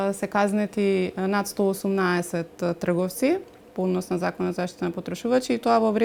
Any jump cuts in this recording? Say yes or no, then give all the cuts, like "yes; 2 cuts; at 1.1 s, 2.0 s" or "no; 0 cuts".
no; 0 cuts